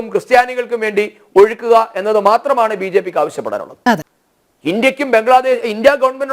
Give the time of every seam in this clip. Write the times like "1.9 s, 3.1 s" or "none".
4.2 s